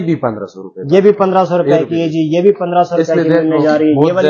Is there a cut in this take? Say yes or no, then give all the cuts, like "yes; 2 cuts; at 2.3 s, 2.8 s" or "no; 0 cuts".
no; 0 cuts